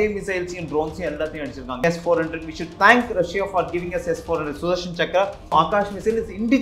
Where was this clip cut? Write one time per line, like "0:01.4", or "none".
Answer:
0:01.8
0:05.5